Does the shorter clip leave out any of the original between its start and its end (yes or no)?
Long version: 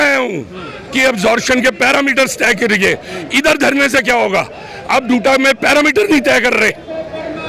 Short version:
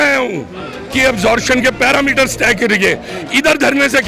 no